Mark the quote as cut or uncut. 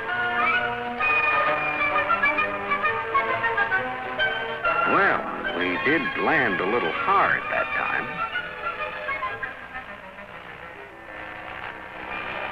uncut